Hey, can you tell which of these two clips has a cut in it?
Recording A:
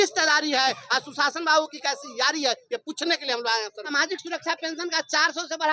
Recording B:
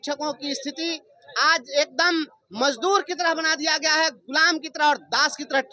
A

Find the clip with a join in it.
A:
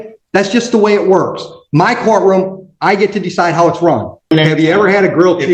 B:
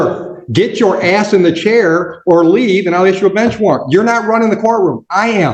A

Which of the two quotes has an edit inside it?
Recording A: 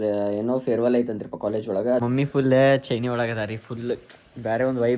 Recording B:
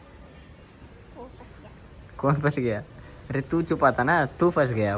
A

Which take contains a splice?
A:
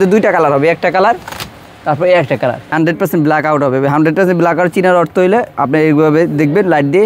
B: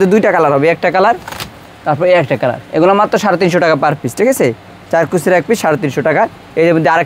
A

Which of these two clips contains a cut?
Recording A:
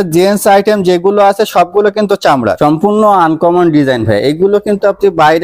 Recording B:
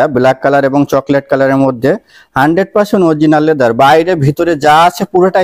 A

